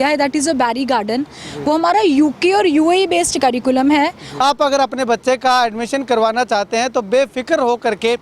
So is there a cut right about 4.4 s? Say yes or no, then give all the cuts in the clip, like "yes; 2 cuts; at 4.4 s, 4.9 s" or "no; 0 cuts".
yes; 1 cut; at 4.4 s